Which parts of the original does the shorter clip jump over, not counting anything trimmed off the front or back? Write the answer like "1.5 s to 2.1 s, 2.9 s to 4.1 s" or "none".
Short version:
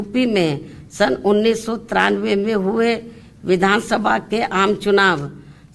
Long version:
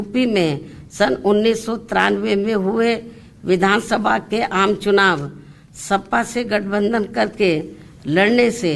none